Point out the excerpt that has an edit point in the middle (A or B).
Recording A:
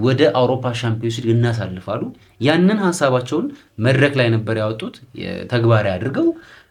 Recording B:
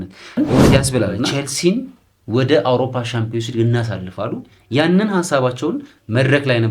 B